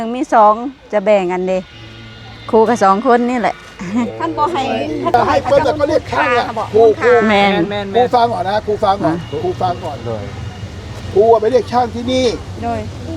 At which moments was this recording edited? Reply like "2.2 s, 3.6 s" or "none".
5.1 s